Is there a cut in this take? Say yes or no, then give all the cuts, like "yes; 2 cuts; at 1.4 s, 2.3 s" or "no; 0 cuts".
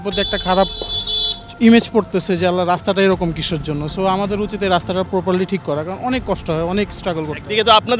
no; 0 cuts